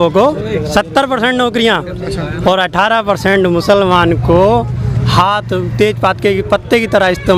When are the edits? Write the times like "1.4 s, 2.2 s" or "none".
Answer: none